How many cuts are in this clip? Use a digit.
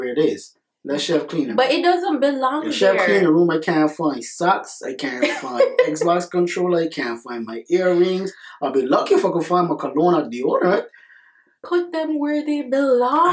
0